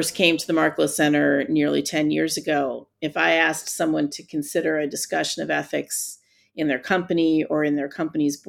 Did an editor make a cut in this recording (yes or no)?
no